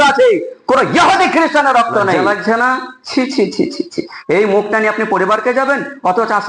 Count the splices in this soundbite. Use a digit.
1